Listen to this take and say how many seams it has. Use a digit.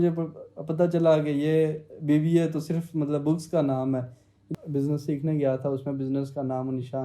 1